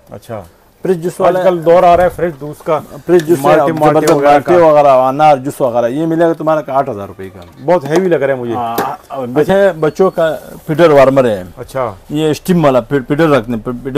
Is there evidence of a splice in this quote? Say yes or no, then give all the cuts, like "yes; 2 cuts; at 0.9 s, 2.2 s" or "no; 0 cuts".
yes; 1 cut; at 9.5 s